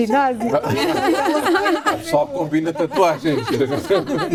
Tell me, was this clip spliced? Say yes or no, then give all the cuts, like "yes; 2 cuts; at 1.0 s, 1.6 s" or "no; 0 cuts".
no; 0 cuts